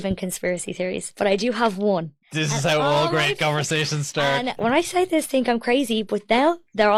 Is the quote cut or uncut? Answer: uncut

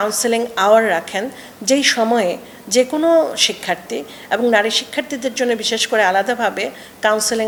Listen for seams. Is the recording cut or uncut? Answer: uncut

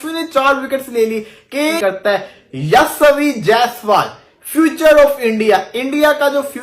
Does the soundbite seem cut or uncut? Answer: cut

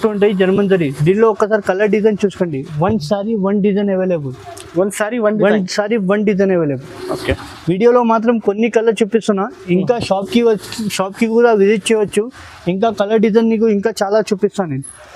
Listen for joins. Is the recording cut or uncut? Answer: uncut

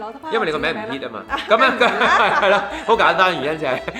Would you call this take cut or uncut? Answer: uncut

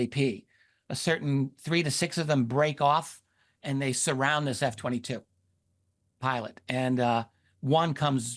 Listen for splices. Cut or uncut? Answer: uncut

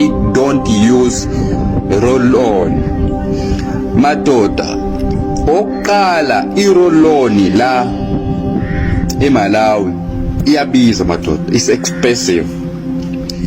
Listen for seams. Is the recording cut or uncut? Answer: uncut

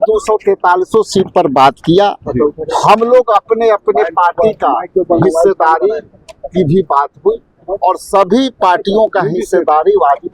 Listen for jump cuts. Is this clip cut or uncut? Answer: uncut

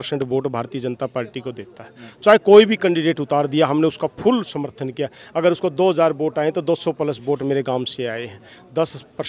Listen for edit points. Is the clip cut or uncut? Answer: uncut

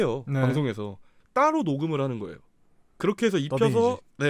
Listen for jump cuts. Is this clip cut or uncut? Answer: cut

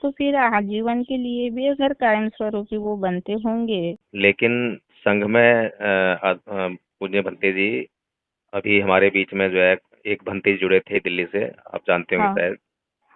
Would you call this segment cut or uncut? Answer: cut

